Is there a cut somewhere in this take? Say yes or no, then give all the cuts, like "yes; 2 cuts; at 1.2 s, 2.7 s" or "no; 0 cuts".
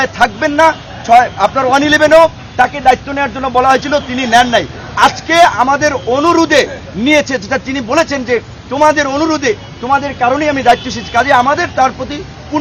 no; 0 cuts